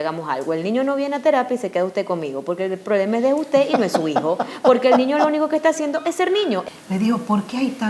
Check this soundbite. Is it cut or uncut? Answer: cut